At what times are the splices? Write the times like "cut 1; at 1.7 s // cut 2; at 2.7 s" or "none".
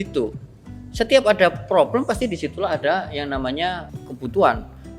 cut 1; at 3.9 s